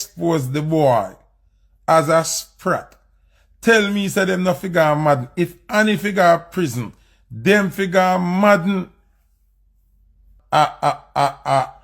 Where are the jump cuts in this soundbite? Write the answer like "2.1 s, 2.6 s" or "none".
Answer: 10.3 s